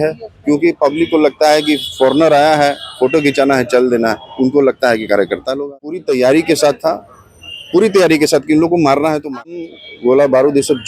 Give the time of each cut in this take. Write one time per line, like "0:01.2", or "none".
0:06.0
0:09.6